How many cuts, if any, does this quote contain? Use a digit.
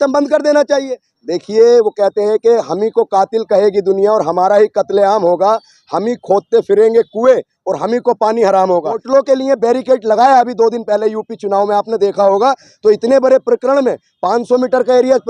2